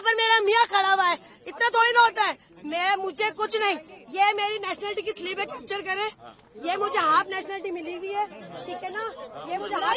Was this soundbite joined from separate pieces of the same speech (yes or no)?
no